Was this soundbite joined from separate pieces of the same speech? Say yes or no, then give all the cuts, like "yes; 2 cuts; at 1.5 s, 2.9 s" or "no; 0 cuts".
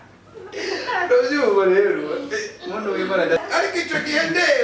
yes; 1 cut; at 3.4 s